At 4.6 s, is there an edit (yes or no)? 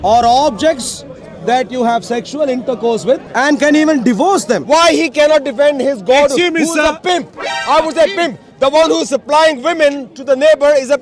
yes